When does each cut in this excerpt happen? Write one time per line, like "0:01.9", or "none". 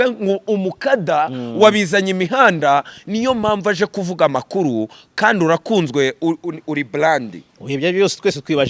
none